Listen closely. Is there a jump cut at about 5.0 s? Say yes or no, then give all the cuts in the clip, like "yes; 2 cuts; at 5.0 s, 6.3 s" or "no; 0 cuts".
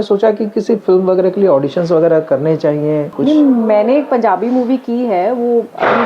no; 1 cut; at 3.1 s